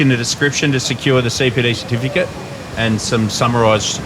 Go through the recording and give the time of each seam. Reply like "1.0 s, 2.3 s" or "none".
2.7 s